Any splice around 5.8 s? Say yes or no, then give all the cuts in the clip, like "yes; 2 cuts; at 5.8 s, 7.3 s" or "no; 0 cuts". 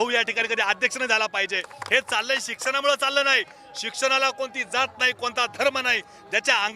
no; 1 cut; at 1.7 s